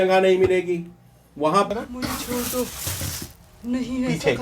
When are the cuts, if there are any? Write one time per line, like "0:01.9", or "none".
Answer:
0:01.7

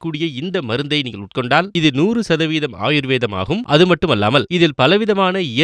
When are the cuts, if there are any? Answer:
0:01.7

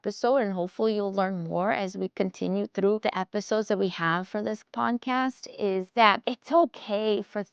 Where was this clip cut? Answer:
0:06.3

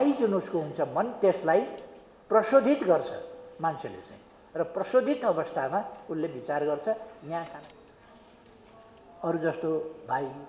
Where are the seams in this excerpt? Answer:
0:07.5

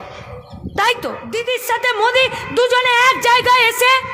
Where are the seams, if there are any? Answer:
0:01.2

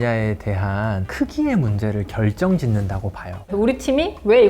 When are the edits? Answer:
0:01.1
0:03.5

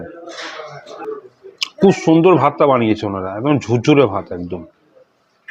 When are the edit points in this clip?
0:01.0

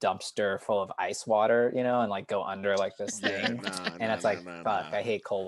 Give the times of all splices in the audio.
none

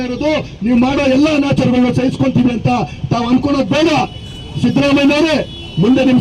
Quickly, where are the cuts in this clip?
none

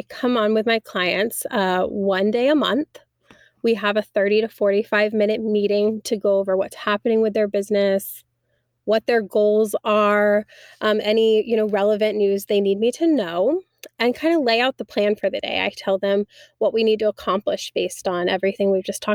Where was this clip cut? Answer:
none

